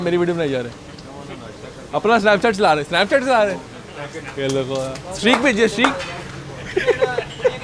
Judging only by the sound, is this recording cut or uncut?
uncut